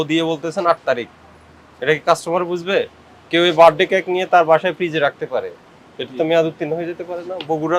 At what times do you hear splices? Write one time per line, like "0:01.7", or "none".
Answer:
none